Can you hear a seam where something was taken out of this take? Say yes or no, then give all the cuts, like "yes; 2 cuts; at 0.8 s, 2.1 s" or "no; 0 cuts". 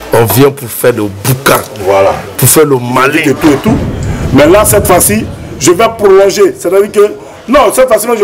yes; 1 cut; at 3.2 s